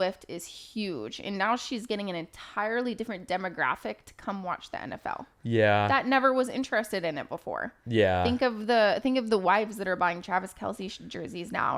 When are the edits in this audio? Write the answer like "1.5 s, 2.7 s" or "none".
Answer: none